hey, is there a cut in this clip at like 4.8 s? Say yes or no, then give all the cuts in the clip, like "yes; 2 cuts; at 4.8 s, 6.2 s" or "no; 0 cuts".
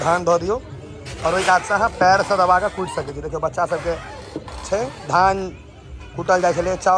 no; 0 cuts